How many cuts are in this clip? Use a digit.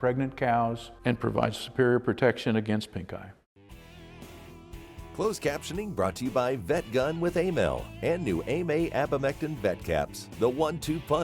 2